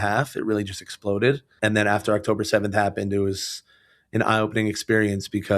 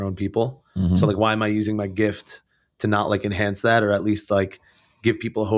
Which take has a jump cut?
first; 1 cut; at 1.5 s

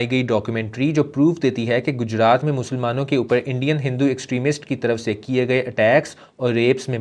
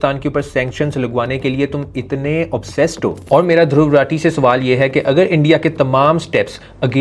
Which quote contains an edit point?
second; 1 cut; at 3.2 s

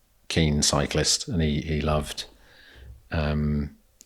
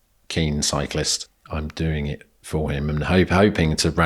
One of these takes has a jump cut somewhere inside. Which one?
second; 1 cut; at 1.2 s

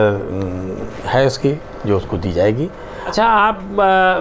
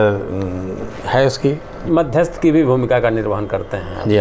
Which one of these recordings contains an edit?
second; 1 cut; at 1.7 s

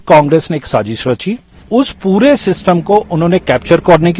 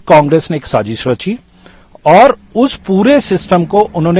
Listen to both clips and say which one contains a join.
first; 1 cut; at 1.6 s

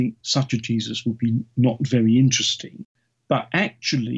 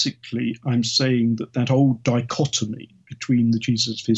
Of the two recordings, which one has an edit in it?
first; 1 cut; at 2.9 s

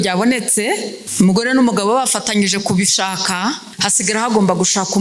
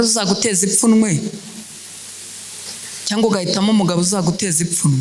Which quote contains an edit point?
first; 2 cuts; at 1.0 s, 3.8 s

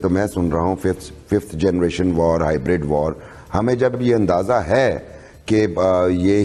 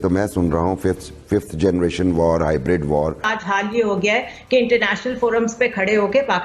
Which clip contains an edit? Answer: second; 1 cut; at 3.3 s

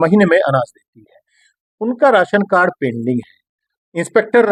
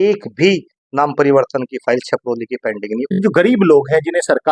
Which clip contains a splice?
second; 1 cut; at 3.2 s

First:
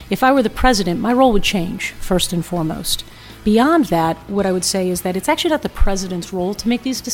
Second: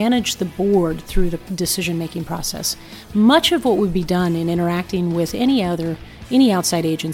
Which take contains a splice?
first; 2 cuts; at 3.4 s, 4.3 s

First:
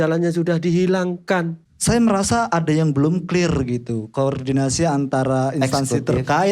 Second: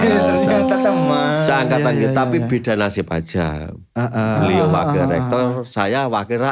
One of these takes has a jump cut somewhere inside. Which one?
first; 1 cut; at 1.6 s

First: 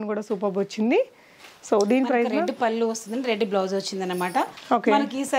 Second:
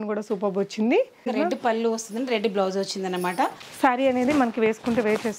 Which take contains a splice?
second; 2 cuts; at 1.3 s, 3.6 s

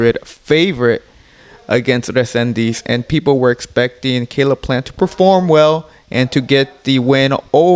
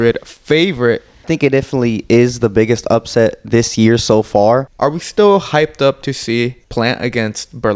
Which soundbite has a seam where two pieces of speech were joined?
second; 3 cuts; at 1.2 s, 4.7 s, 6.6 s

